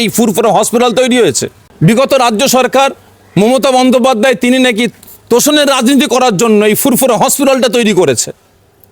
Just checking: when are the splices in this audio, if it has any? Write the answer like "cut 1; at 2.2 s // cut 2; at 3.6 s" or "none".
cut 1; at 1.6 s

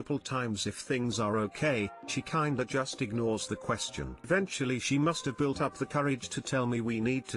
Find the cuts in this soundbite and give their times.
cut 1; at 4.3 s

